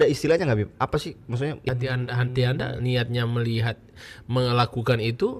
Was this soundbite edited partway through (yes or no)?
yes